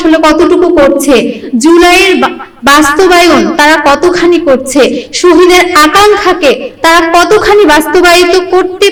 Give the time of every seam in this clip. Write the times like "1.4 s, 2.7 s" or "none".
none